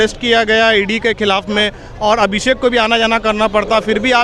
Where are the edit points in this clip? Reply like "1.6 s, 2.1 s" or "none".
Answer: none